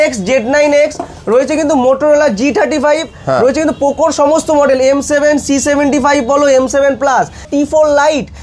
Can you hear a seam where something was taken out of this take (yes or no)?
yes